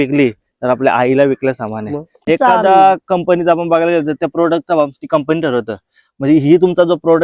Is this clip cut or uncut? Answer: cut